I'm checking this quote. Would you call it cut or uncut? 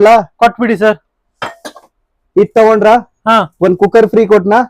uncut